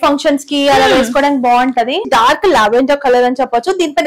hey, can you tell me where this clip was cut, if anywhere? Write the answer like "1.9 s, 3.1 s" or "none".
2.1 s